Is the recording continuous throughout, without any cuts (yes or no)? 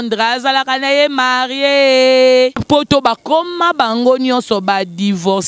no